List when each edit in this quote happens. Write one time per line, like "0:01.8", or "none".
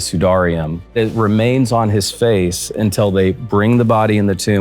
0:00.9